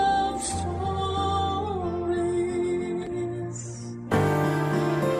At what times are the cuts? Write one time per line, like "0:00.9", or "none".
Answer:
0:04.0